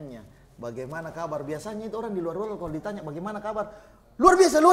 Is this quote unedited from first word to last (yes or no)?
yes